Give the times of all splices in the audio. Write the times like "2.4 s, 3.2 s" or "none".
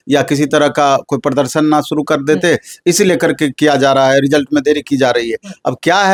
none